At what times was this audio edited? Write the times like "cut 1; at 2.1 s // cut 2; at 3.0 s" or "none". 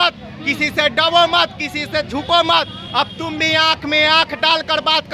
none